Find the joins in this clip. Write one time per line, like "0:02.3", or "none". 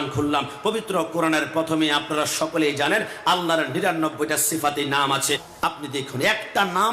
0:05.5